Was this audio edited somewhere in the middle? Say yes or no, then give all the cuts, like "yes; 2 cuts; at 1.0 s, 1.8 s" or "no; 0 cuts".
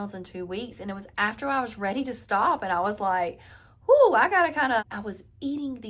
yes; 1 cut; at 4.8 s